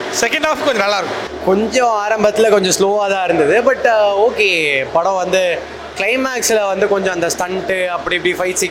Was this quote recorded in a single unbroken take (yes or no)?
no